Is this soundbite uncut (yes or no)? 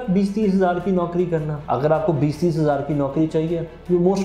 no